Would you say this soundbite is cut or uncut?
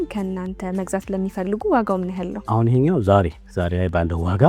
cut